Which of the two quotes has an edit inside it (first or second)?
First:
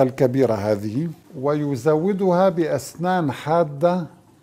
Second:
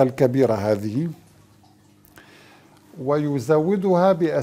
first